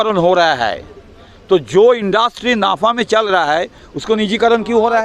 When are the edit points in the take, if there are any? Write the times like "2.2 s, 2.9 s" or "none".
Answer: 3.8 s